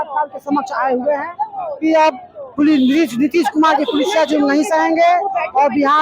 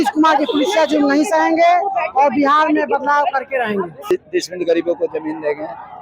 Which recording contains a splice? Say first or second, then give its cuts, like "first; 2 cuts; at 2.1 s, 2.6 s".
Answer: second; 1 cut; at 4.1 s